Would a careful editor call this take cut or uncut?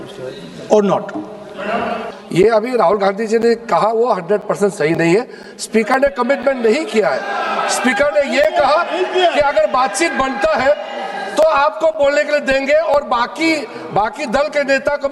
cut